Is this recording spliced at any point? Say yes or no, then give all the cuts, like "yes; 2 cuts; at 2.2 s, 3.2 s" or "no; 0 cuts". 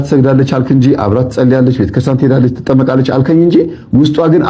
no; 0 cuts